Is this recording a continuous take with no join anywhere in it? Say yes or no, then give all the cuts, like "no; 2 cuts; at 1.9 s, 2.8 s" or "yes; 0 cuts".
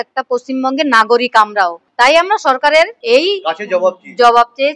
no; 2 cuts; at 1.8 s, 3.0 s